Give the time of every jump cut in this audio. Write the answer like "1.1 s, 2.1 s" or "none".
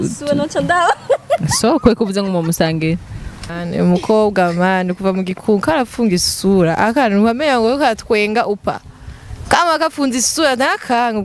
3.5 s